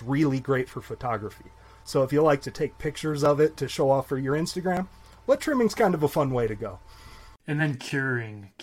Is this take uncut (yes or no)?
yes